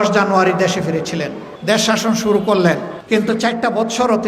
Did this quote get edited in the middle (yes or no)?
yes